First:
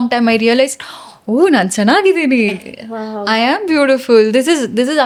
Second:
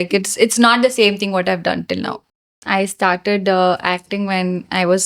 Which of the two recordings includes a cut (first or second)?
second